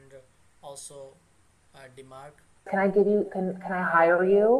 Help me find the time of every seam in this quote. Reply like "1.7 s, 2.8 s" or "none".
2.7 s